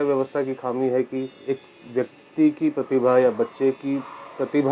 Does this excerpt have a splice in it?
yes; 1 cut; at 1.3 s

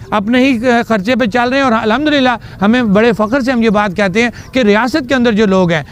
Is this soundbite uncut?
yes; 0 cuts

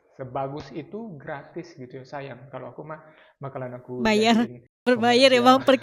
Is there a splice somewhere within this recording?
no; 0 cuts

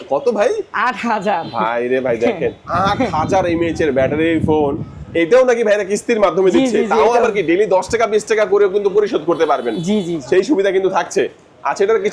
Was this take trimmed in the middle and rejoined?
no; 0 cuts

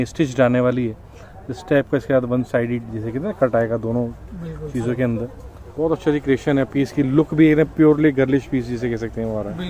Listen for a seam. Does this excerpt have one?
no; 0 cuts

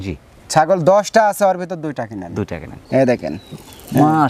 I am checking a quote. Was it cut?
yes; 1 cut; at 2.8 s

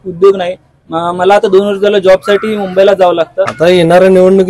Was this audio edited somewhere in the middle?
yes; 1 cut; at 3.5 s

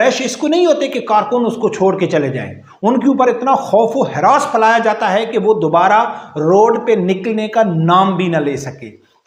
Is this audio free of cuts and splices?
yes; 0 cuts

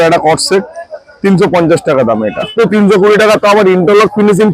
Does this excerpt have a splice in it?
yes; 1 cut; at 2.5 s

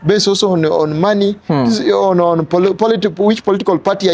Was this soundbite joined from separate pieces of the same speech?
no; 0 cuts

